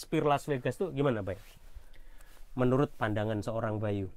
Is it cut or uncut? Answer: uncut